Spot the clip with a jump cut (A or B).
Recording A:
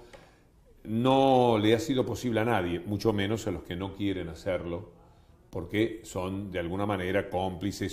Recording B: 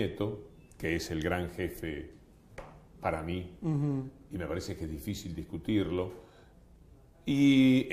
B